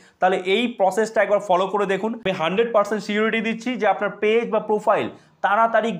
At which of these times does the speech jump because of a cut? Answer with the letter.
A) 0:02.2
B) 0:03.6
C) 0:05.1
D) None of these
A